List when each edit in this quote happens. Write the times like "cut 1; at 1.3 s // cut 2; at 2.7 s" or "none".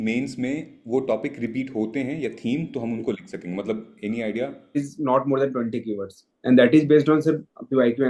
cut 1; at 4.8 s